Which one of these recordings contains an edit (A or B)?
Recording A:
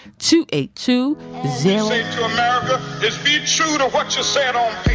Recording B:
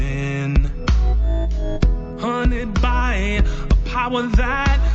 A